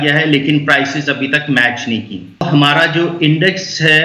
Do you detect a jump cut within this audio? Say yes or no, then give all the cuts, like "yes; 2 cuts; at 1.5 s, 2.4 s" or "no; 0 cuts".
yes; 1 cut; at 2.5 s